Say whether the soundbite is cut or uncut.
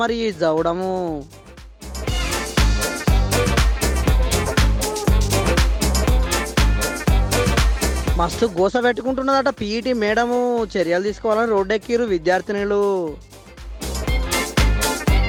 uncut